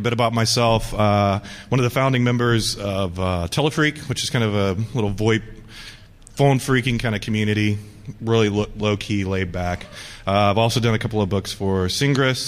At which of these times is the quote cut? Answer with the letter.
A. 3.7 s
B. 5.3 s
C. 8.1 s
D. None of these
D